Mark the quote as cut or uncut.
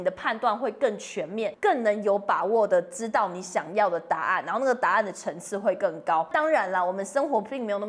cut